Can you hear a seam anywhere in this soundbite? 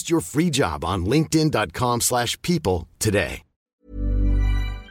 yes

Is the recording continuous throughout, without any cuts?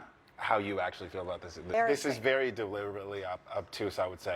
no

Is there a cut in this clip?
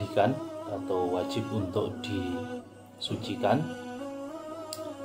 yes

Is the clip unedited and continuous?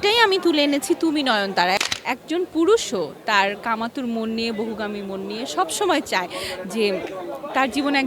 no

